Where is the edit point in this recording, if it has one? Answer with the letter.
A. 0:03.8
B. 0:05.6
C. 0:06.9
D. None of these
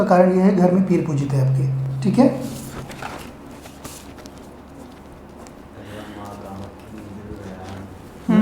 B